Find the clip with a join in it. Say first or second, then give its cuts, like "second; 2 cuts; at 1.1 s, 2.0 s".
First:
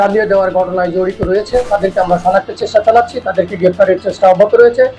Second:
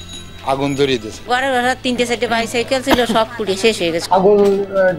second; 2 cuts; at 1.2 s, 4.0 s